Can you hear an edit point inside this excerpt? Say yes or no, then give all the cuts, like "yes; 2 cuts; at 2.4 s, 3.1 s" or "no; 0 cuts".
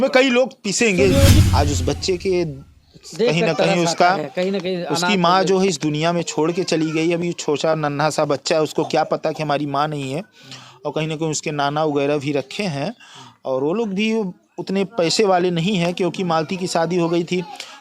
yes; 1 cut; at 1.4 s